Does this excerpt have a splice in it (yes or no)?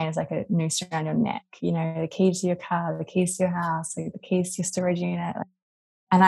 yes